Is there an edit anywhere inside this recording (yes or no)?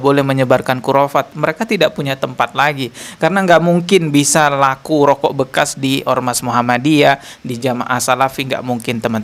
no